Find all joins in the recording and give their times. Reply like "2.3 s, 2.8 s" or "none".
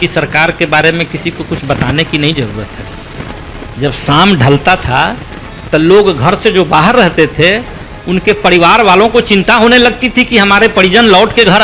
none